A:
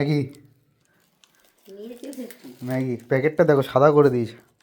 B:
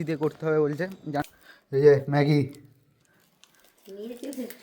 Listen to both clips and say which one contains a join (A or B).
B